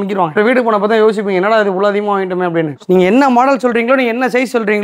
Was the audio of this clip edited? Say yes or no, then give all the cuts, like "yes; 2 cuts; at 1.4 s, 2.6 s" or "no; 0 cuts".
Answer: yes; 1 cut; at 2.7 s